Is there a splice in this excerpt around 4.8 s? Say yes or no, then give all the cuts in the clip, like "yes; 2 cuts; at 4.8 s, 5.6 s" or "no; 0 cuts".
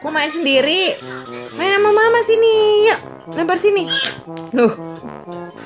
yes; 1 cut; at 4.8 s